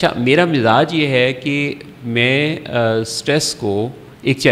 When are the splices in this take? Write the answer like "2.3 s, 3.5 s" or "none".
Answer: none